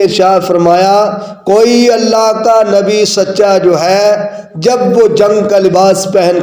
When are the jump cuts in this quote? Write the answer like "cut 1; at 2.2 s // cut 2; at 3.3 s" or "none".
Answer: none